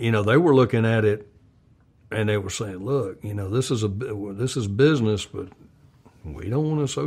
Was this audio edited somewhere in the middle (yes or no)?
no